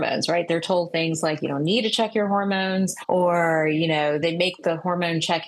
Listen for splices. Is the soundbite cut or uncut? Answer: cut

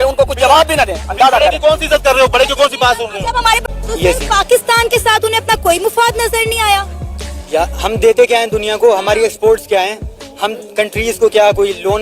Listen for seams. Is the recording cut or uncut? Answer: cut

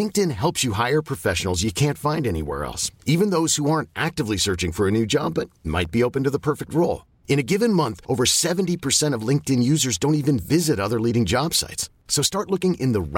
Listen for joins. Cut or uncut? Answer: uncut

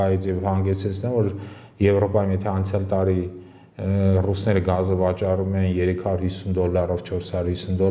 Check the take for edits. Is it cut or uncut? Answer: uncut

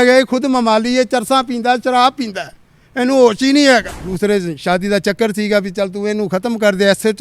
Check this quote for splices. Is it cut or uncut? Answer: cut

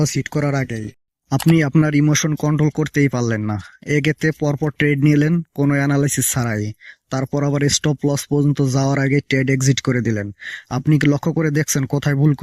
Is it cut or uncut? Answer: uncut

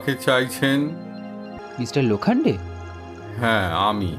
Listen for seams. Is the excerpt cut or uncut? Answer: cut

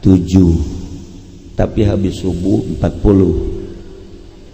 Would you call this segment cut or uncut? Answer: uncut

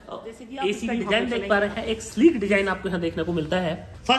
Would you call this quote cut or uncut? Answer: cut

